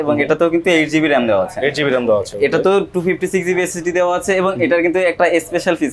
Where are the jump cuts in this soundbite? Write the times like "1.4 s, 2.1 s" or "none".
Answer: none